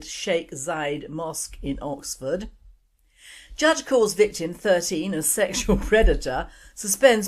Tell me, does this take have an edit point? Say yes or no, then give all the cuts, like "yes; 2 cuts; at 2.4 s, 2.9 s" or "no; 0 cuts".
yes; 1 cut; at 5.5 s